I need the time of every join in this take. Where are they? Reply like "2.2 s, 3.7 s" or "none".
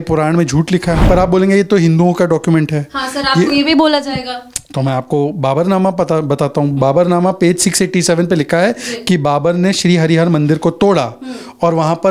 1.0 s